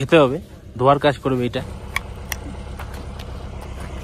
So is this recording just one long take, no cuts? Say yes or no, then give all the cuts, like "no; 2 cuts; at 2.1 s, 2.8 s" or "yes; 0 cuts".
no; 1 cut; at 1.8 s